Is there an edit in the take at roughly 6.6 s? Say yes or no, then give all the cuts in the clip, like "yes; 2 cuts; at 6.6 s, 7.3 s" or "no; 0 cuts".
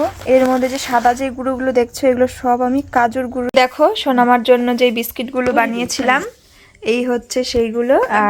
no; 1 cut; at 3.5 s